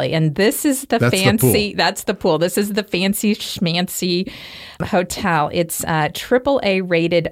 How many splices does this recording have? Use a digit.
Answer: 1